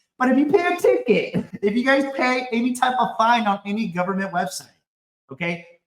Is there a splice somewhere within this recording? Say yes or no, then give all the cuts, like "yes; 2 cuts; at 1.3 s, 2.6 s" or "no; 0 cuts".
yes; 1 cut; at 1.4 s